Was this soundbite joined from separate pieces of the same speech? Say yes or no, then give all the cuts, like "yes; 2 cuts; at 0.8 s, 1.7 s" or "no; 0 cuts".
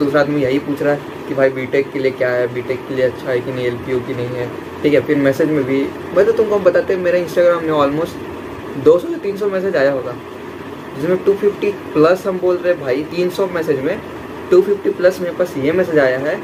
no; 0 cuts